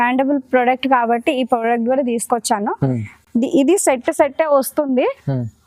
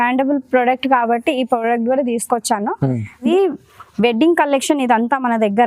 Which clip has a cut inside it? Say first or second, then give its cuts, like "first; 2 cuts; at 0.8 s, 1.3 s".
second; 1 cut; at 3.3 s